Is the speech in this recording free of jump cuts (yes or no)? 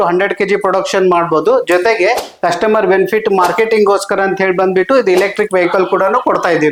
yes